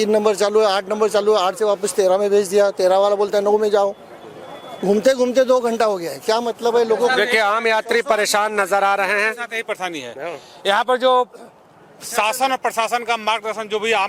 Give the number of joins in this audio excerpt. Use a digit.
0